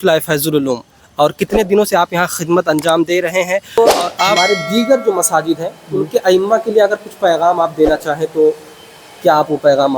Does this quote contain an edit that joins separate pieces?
yes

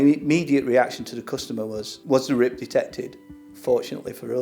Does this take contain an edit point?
yes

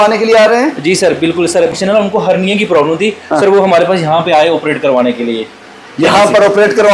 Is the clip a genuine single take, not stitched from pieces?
no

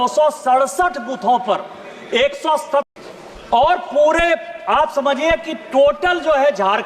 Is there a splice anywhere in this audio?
yes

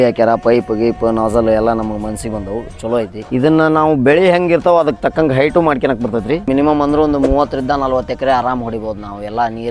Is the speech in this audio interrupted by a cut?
yes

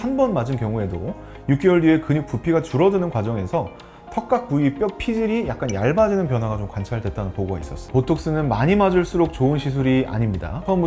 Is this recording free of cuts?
no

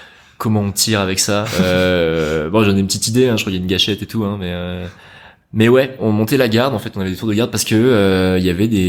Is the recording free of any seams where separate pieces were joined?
yes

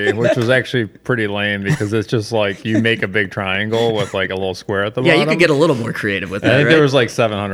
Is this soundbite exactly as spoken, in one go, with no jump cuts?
yes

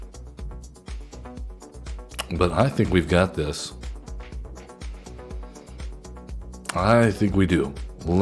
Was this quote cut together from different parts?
no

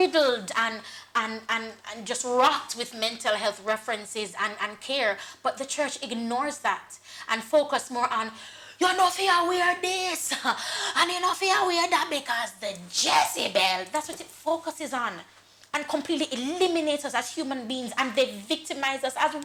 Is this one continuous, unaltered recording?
yes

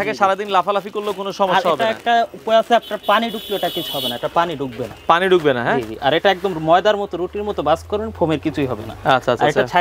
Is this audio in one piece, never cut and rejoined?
yes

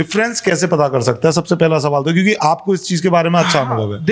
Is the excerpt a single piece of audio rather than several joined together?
yes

